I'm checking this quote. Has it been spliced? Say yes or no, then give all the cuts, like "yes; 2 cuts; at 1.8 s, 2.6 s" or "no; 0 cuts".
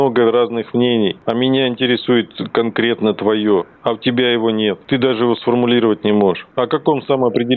yes; 4 cuts; at 1.2 s, 3.7 s, 4.8 s, 6.5 s